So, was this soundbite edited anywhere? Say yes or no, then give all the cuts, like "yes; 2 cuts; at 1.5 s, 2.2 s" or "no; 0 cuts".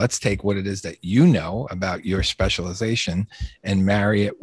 no; 0 cuts